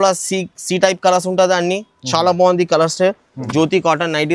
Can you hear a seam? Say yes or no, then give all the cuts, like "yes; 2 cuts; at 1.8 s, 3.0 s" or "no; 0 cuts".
yes; 1 cut; at 3.3 s